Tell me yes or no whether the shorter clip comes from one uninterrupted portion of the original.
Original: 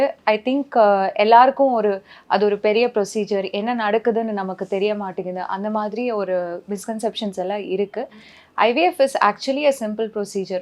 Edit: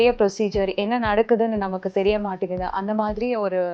yes